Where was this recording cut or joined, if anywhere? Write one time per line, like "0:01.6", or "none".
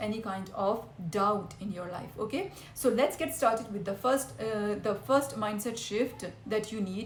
none

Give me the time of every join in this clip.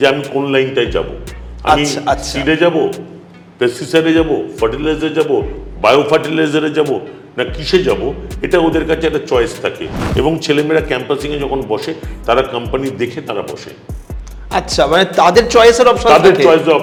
none

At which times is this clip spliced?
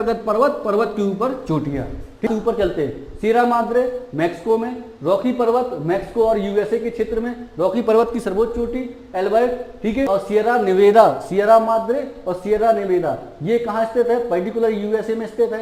0:02.3
0:10.1

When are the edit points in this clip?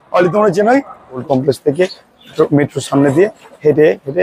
0:01.2

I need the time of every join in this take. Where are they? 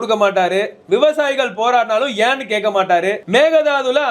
0:03.2

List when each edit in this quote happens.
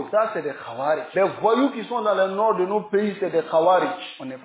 none

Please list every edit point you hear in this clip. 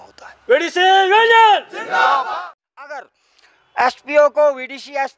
0:02.3

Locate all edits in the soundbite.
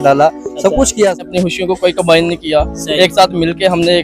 0:01.2

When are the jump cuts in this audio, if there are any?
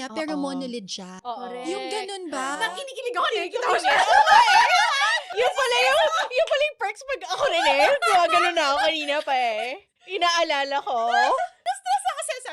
none

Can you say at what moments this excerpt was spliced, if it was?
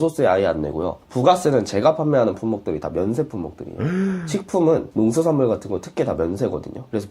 none

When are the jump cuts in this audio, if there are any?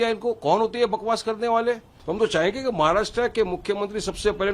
0:01.9

